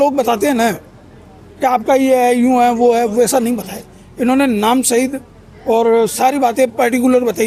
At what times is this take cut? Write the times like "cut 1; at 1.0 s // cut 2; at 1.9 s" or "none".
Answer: none